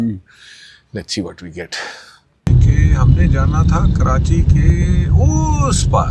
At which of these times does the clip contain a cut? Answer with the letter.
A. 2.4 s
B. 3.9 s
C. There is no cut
A